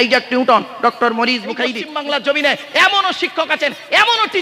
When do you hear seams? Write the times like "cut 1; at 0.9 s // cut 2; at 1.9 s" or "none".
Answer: cut 1; at 1.8 s